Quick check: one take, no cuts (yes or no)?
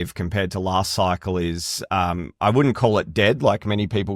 yes